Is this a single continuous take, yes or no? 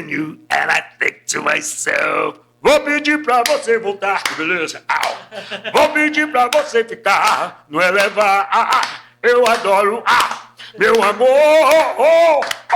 yes